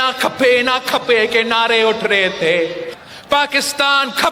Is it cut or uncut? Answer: cut